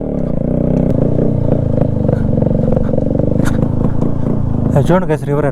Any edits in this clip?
yes; 1 cut; at 0.9 s

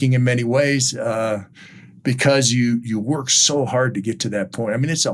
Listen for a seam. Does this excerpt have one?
no; 0 cuts

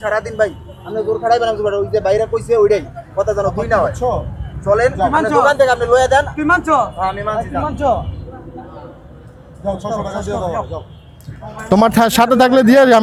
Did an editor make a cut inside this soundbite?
no; 0 cuts

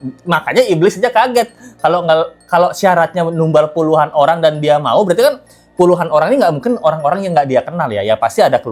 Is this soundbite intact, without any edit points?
yes; 0 cuts

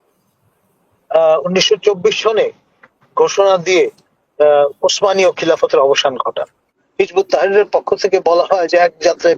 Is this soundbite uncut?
no; 1 cut; at 6.8 s

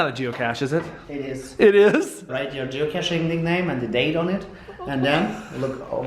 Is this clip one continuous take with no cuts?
no; 1 cut; at 2.3 s

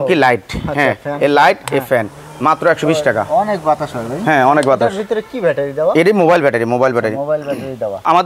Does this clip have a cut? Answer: no; 0 cuts

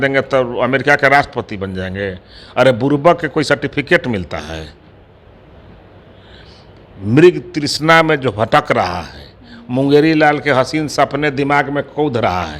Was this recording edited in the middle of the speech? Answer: no; 0 cuts

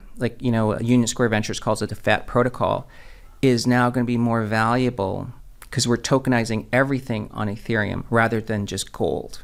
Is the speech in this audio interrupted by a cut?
no; 0 cuts

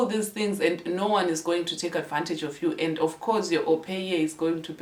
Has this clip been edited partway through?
no; 0 cuts

